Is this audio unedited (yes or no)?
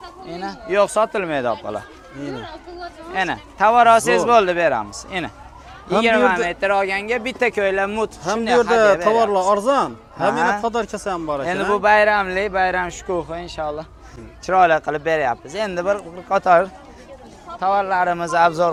yes